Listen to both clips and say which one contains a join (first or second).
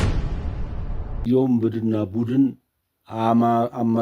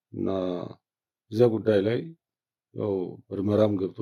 first